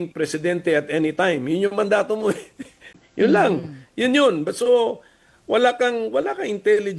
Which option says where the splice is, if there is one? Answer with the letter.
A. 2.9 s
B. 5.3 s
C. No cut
A